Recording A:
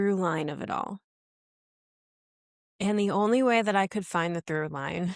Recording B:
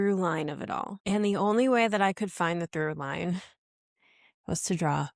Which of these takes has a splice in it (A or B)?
B